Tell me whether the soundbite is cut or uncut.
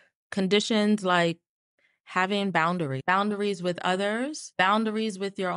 cut